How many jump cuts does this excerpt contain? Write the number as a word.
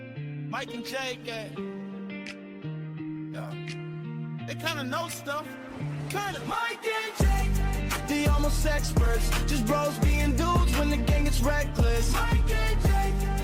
zero